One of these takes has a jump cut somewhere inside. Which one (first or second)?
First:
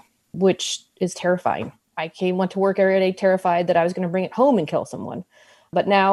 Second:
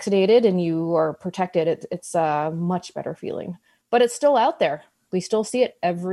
first